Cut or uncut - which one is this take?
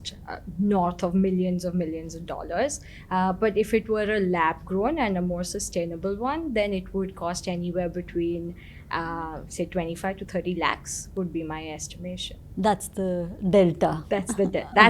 uncut